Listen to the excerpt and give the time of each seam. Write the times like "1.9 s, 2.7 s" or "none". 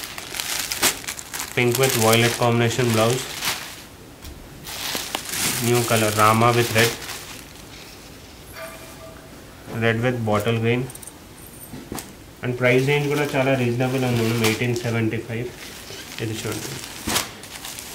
none